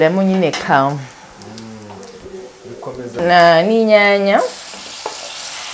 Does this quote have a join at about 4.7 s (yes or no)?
no